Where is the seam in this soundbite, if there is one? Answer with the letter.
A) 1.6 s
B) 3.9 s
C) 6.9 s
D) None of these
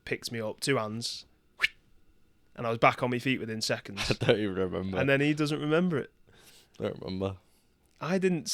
D